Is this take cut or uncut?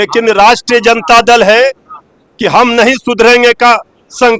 uncut